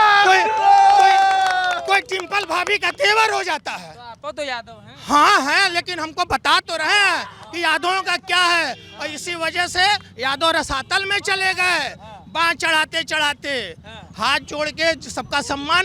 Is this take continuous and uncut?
yes; 0 cuts

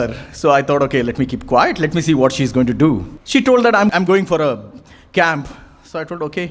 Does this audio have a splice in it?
yes; 2 cuts; at 3.1 s, 3.9 s

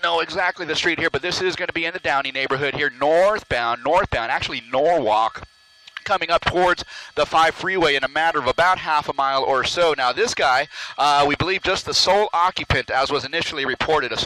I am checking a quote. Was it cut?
no; 0 cuts

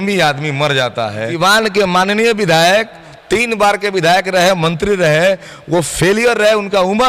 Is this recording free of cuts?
no; 1 cut; at 1.3 s

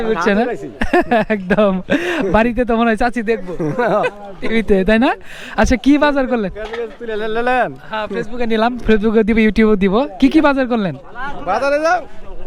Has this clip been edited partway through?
no; 0 cuts

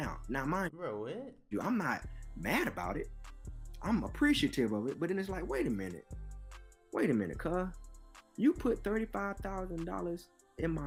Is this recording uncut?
yes; 0 cuts

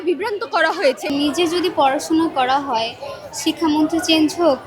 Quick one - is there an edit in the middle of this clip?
yes; 1 cut; at 1.0 s

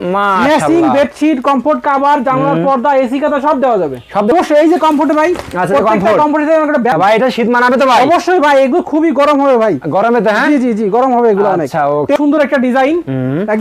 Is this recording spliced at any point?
yes; 3 cuts; at 4.3 s, 6.9 s, 12.2 s

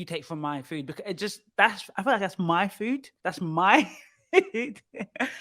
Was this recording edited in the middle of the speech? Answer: yes; 1 cut; at 3.2 s

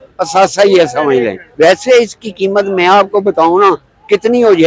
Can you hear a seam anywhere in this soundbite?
yes; 1 cut; at 1.4 s

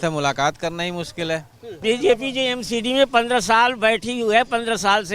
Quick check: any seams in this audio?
yes; 1 cut; at 1.8 s

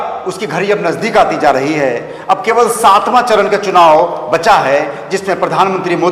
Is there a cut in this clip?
no; 0 cuts

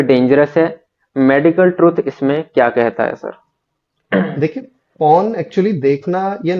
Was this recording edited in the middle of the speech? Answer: no; 0 cuts

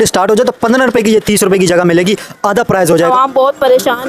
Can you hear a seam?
yes; 1 cut; at 3.1 s

